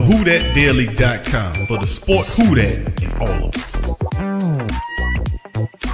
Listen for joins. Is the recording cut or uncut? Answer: uncut